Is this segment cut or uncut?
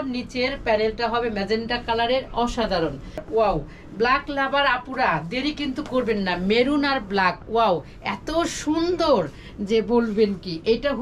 cut